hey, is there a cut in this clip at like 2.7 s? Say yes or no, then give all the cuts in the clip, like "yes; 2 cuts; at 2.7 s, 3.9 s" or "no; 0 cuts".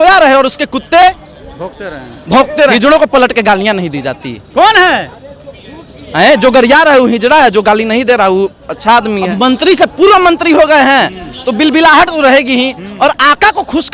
yes; 2 cuts; at 2.7 s, 9.3 s